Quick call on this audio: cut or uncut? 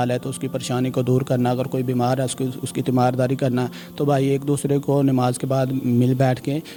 uncut